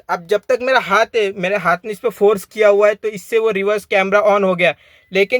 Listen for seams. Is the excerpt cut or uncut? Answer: uncut